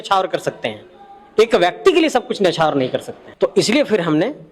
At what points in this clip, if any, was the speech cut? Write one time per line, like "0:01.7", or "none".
0:03.2